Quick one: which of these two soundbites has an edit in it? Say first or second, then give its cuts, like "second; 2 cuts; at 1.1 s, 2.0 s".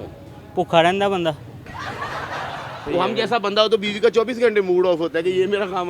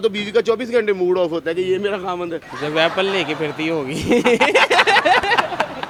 first; 1 cut; at 2.8 s